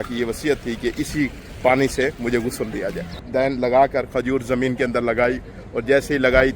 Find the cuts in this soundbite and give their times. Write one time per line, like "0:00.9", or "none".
0:01.4
0:03.1